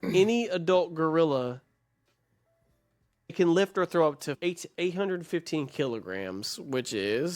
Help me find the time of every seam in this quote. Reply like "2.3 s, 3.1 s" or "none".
3.3 s, 4.3 s